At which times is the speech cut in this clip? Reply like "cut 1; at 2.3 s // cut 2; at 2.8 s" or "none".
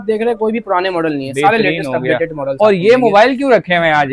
none